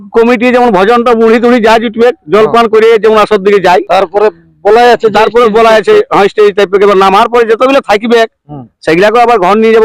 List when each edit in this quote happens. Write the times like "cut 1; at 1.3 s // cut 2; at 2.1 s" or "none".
none